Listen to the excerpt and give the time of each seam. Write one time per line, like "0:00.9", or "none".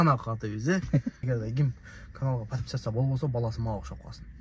0:01.2